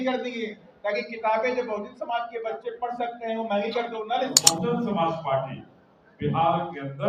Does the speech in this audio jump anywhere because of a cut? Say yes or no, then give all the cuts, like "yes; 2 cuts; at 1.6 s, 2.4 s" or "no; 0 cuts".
yes; 1 cut; at 4.5 s